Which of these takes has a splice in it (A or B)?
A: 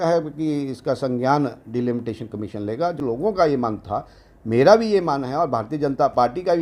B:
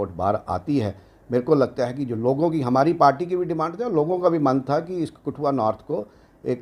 A